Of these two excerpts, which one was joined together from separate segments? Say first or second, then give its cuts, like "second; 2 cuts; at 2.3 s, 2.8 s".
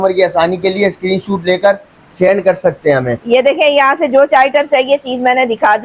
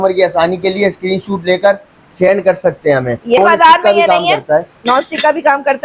second; 1 cut; at 3.4 s